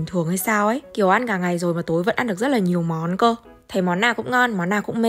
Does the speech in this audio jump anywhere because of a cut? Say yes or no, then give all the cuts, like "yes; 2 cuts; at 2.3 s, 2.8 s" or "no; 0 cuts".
no; 0 cuts